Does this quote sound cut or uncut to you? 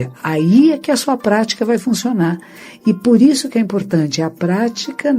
uncut